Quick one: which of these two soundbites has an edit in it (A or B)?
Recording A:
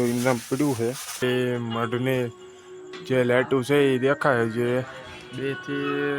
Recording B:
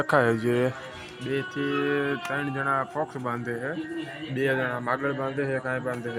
A